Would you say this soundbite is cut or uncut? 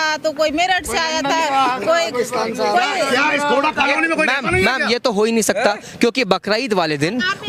uncut